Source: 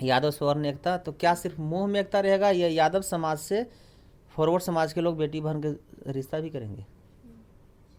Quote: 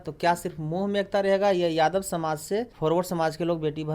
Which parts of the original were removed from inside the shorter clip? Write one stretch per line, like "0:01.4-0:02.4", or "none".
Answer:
0:03.7-0:04.3